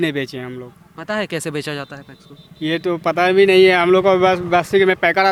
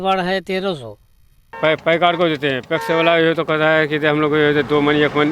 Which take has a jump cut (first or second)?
second